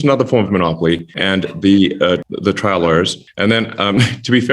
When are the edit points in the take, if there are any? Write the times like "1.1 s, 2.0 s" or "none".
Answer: 1.1 s, 2.3 s, 3.2 s